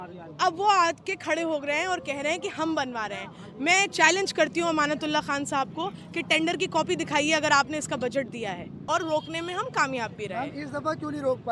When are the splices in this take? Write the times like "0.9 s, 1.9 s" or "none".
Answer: 8.8 s